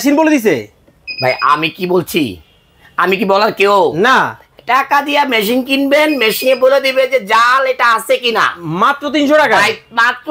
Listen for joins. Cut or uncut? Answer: uncut